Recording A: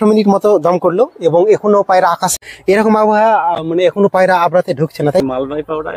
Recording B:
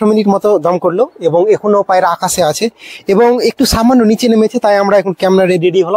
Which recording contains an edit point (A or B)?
A